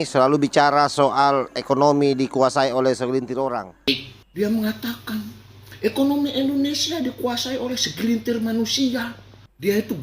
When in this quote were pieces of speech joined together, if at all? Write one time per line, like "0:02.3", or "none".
0:03.9